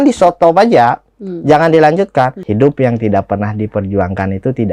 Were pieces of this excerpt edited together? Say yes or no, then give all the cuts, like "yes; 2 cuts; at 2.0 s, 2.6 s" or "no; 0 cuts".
yes; 1 cut; at 2.4 s